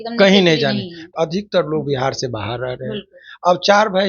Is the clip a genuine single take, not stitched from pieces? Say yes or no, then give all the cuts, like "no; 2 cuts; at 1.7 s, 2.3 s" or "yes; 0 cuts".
no; 1 cut; at 1.0 s